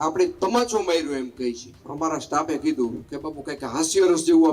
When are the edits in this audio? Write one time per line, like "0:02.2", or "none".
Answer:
0:01.8